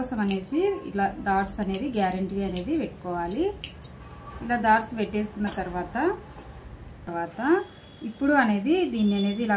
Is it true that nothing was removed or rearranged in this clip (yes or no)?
no